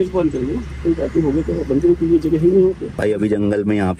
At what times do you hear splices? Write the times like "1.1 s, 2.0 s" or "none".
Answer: 3.0 s